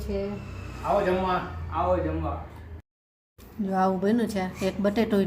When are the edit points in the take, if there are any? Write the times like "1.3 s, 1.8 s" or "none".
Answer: 2.9 s